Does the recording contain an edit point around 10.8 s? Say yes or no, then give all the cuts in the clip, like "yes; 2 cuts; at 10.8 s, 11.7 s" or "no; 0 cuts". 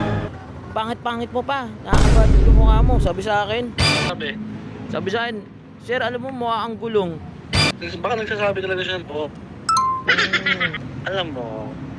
yes; 3 cuts; at 4.1 s, 7.7 s, 10.8 s